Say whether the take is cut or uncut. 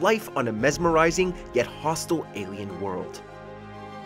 cut